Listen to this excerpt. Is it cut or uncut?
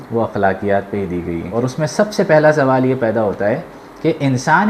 cut